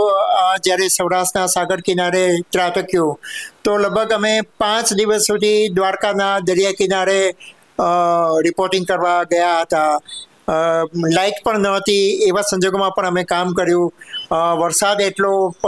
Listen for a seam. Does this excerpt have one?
no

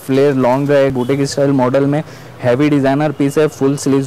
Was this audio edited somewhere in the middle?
yes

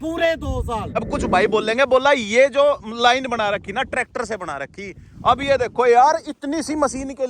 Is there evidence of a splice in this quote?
yes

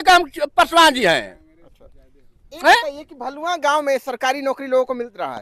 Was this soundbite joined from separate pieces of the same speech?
no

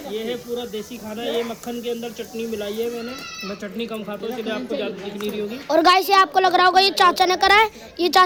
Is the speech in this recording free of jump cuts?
yes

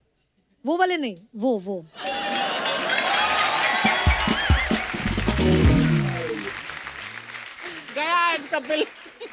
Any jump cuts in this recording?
no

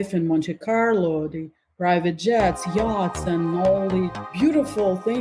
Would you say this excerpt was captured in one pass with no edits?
no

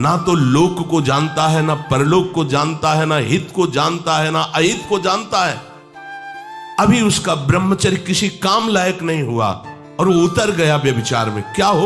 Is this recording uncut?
yes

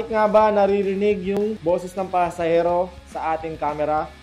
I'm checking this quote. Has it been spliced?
yes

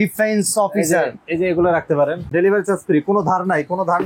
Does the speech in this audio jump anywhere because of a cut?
yes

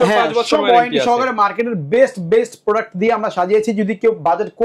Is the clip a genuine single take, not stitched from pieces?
yes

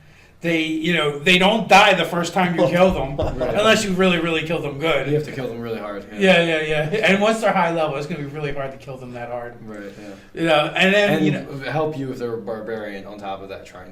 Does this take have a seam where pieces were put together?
no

